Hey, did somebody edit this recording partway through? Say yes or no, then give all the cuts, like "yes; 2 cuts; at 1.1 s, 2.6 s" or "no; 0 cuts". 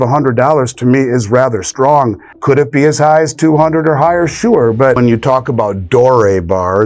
yes; 2 cuts; at 2.3 s, 5.0 s